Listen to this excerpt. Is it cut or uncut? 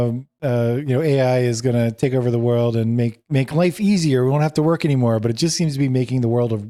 uncut